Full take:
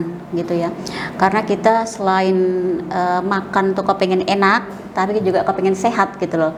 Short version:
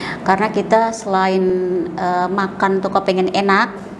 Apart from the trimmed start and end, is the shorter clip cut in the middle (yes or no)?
no